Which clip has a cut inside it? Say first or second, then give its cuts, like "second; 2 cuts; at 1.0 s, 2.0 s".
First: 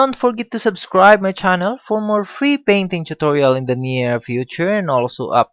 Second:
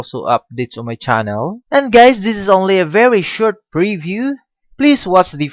second; 1 cut; at 1.6 s